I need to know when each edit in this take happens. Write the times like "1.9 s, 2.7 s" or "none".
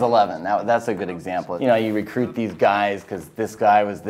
1.5 s